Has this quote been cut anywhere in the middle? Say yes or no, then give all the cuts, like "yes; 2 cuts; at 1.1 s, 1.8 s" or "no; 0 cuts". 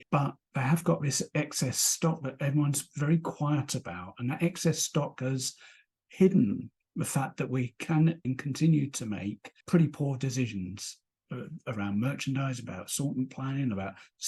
no; 0 cuts